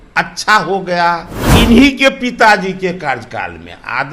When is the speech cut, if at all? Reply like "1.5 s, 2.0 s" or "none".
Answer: 1.4 s